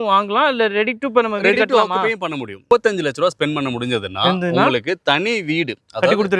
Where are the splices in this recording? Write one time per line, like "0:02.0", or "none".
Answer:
0:02.6